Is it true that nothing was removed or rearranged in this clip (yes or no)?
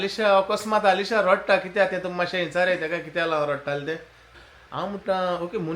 no